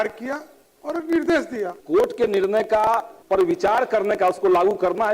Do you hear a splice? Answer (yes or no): yes